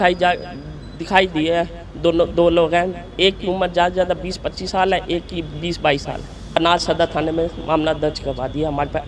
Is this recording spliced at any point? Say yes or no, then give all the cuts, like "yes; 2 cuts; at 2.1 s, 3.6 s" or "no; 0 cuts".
yes; 1 cut; at 6.6 s